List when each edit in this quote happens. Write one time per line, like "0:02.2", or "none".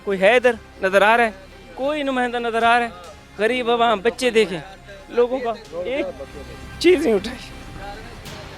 none